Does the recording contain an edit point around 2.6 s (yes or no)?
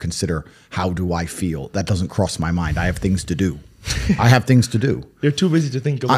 no